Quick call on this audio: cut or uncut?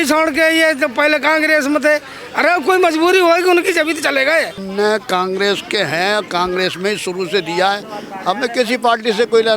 cut